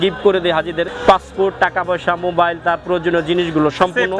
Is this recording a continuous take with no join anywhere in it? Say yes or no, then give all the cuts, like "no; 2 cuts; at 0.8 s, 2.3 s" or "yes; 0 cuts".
no; 1 cut; at 0.9 s